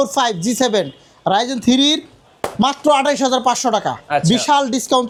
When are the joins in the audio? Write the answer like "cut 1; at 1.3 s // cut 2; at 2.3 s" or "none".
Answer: none

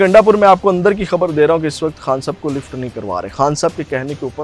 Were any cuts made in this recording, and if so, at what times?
none

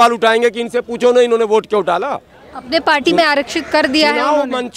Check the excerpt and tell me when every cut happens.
none

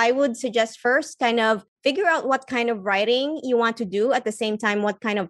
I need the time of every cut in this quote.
cut 1; at 1.7 s

